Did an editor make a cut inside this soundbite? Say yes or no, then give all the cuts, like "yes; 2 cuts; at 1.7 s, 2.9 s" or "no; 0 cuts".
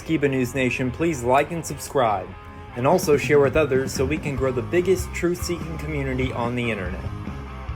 no; 0 cuts